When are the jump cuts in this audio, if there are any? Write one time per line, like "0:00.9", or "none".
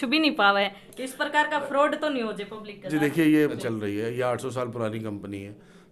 0:03.6